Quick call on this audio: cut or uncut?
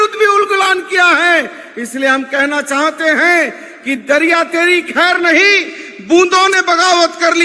uncut